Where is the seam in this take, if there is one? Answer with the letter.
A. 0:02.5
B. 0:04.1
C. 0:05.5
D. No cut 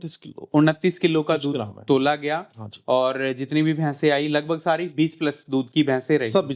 D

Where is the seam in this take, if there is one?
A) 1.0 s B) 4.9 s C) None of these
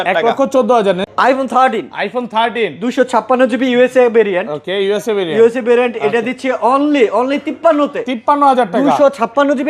A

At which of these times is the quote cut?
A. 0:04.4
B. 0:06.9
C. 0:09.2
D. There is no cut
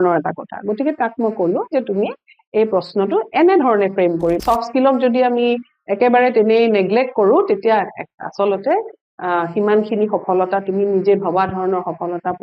A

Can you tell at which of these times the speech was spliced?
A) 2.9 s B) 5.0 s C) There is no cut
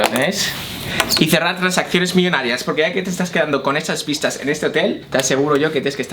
B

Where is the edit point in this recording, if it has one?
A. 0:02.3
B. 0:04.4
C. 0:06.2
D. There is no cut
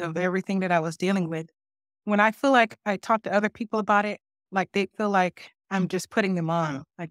D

